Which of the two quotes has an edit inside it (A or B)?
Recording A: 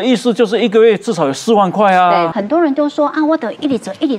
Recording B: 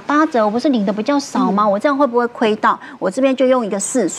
A